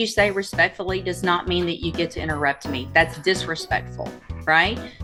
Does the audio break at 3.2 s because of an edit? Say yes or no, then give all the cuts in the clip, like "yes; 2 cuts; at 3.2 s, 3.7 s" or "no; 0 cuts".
no; 0 cuts